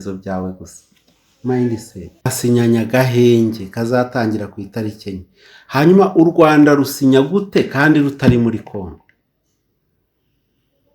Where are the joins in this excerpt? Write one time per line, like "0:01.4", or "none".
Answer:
0:02.2